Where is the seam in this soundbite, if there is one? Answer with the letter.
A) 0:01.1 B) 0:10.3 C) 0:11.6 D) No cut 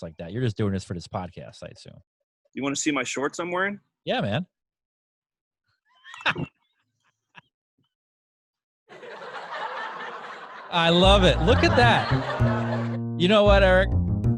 D